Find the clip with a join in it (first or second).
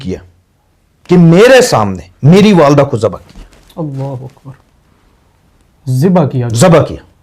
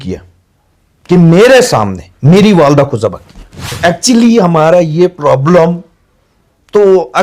second